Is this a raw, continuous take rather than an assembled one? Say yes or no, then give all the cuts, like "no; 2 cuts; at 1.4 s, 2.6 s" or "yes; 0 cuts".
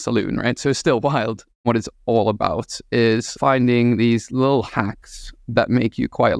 no; 2 cuts; at 1.7 s, 3.3 s